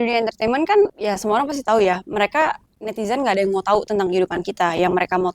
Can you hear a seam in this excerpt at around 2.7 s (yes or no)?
no